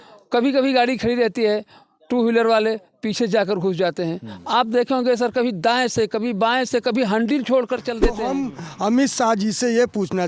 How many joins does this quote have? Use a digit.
1